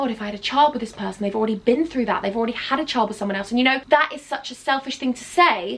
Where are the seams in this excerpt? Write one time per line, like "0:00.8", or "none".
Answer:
none